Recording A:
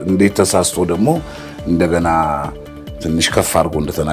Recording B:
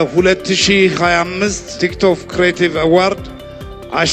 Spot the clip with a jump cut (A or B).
B